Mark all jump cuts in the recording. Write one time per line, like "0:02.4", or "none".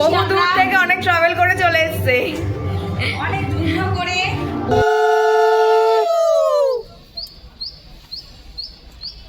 0:04.7

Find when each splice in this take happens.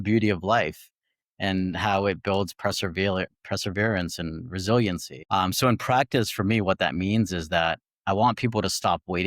0:05.1

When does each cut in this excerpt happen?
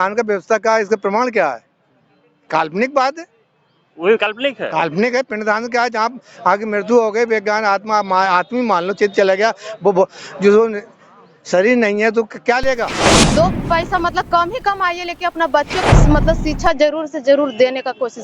0:13.1

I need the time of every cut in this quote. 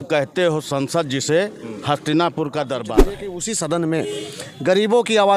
0:02.9

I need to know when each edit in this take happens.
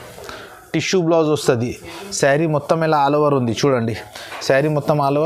none

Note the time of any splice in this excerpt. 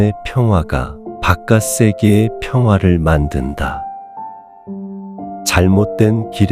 0:04.0
0:05.5

